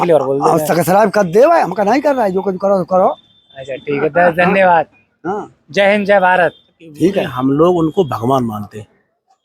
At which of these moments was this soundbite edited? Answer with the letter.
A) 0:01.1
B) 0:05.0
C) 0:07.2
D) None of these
C